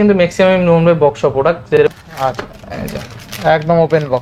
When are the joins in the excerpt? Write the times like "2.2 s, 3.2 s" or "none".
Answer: 1.8 s